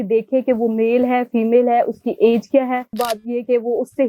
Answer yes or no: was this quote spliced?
yes